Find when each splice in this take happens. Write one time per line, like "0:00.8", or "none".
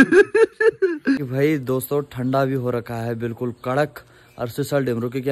0:01.2